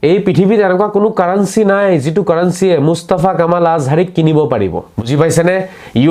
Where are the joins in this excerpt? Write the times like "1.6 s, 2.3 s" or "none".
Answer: 4.9 s